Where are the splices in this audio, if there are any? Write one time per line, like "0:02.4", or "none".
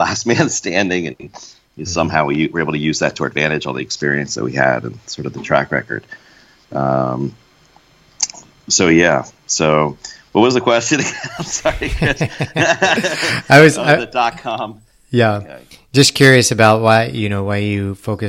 none